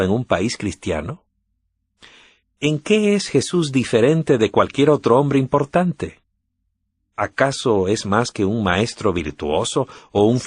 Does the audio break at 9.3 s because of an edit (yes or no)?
yes